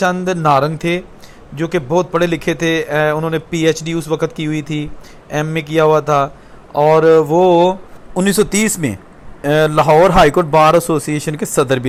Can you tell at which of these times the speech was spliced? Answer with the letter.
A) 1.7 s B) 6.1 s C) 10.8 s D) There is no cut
D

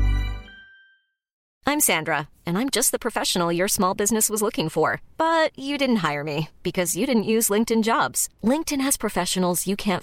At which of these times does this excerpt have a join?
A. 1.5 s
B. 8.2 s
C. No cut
A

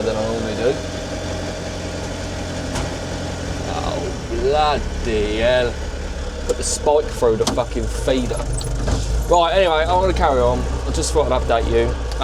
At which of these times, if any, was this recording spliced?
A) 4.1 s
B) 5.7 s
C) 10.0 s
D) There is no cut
D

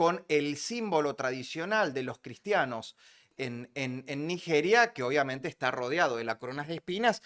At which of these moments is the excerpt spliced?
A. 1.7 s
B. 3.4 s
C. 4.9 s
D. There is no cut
D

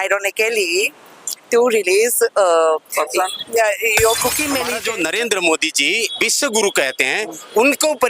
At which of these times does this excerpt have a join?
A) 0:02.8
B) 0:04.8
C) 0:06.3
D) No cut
B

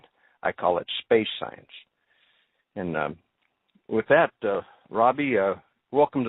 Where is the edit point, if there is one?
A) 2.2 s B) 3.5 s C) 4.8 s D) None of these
A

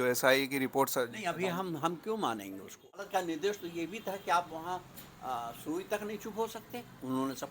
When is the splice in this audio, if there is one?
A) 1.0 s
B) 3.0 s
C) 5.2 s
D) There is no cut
B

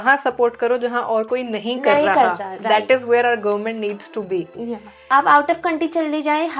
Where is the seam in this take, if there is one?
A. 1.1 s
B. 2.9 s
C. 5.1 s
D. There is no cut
C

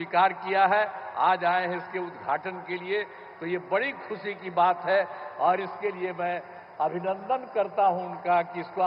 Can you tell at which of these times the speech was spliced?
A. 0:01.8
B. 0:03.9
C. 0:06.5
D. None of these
D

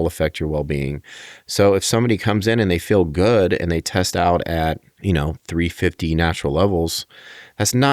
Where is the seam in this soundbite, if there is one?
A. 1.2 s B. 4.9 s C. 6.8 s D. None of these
B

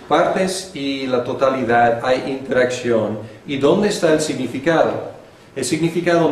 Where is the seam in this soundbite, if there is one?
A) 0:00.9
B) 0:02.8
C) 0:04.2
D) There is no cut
C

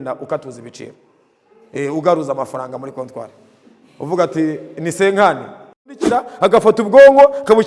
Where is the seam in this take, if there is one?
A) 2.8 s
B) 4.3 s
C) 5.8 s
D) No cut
C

